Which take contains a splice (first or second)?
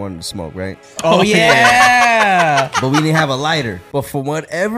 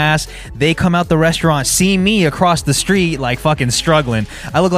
first